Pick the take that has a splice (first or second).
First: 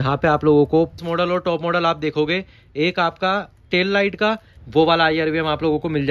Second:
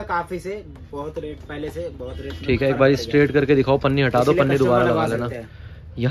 first